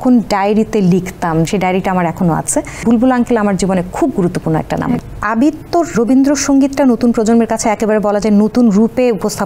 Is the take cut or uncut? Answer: cut